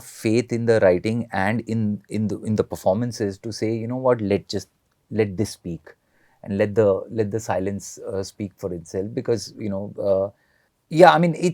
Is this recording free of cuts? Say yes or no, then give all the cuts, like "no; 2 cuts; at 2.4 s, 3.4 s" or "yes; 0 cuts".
yes; 0 cuts